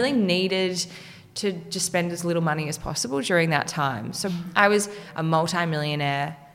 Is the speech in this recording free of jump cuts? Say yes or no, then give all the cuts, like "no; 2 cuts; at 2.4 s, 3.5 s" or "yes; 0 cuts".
no; 2 cuts; at 4.3 s, 5.0 s